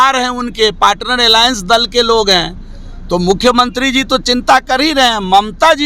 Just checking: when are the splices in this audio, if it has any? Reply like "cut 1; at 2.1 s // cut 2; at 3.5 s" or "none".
none